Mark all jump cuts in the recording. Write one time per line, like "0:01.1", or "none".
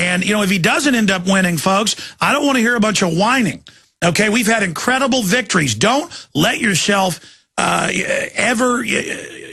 0:06.1